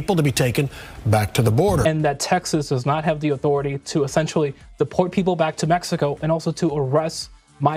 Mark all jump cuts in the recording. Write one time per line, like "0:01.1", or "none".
none